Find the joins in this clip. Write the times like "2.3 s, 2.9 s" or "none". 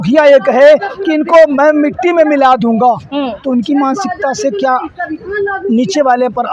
none